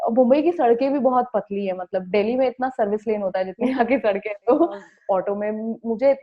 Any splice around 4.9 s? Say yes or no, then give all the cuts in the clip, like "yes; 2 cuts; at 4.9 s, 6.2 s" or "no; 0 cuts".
yes; 1 cut; at 4.9 s